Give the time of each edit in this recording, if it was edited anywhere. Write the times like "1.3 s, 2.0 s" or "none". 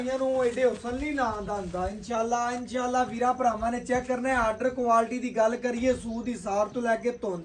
none